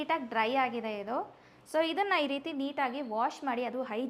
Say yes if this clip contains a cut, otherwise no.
no